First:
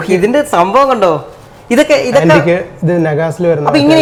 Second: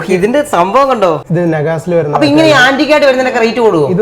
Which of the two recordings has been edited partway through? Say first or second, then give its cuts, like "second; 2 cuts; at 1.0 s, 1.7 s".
second; 1 cut; at 1.2 s